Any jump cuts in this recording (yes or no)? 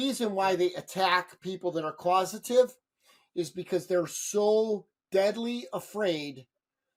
no